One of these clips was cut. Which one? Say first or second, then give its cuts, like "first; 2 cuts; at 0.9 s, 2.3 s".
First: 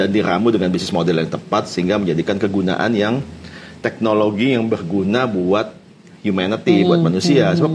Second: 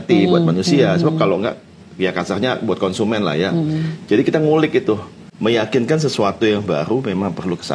second; 1 cut; at 5.2 s